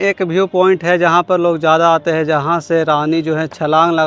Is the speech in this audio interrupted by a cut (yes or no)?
no